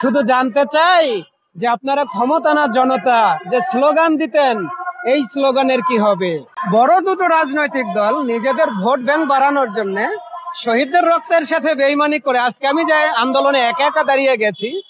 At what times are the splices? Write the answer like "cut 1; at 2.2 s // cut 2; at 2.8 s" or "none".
cut 1; at 6.5 s

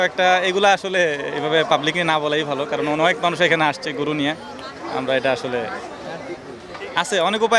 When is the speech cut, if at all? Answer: none

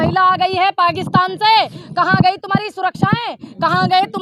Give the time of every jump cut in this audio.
none

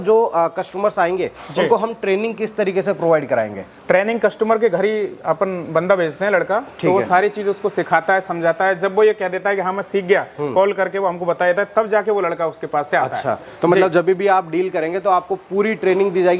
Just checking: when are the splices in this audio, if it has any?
none

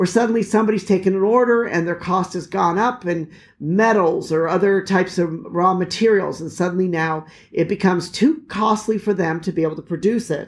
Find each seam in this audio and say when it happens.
none

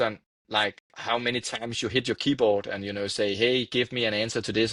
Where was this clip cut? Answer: none

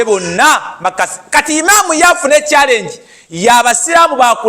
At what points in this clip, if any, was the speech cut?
none

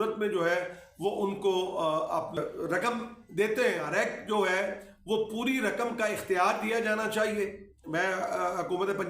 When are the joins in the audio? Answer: cut 1; at 2.3 s // cut 2; at 3.8 s

